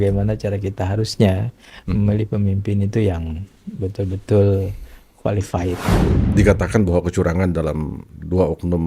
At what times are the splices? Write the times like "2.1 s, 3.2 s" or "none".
6.0 s